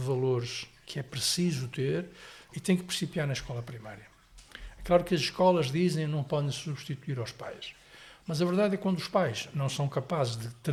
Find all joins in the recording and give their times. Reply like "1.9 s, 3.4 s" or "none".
none